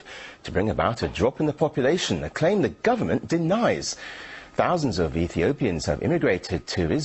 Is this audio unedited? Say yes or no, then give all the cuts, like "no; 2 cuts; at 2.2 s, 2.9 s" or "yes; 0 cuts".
no; 1 cut; at 1.2 s